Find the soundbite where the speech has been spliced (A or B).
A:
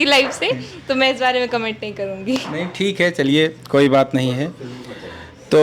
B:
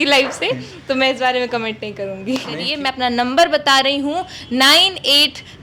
B